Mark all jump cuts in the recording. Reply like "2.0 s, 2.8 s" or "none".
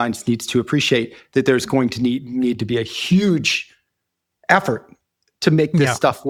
none

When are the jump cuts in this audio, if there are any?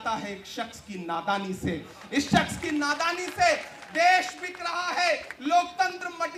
none

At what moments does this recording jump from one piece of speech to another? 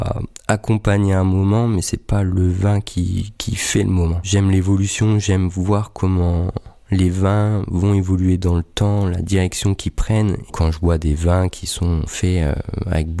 4.2 s, 10.5 s, 12.1 s

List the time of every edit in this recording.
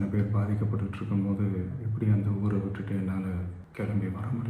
3.6 s

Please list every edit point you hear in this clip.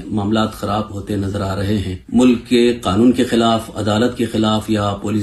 2.0 s

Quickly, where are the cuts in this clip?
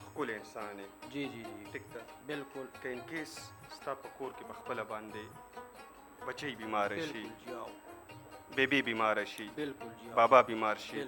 none

